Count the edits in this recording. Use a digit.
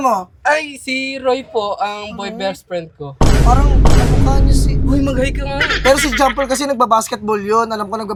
0